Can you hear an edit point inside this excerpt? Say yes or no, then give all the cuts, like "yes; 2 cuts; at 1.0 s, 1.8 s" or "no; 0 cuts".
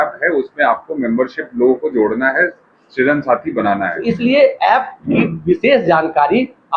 yes; 1 cut; at 4.0 s